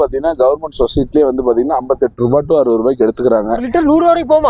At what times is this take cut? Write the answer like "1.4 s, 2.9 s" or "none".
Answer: 3.6 s